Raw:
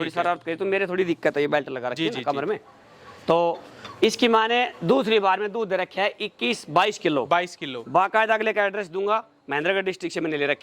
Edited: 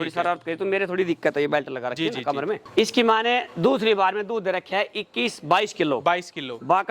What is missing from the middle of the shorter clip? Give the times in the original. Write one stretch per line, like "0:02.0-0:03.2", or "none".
0:02.6-0:03.9